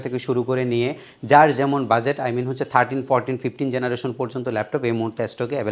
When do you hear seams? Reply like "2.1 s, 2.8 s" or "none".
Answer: none